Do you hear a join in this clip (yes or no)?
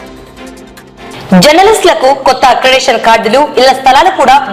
no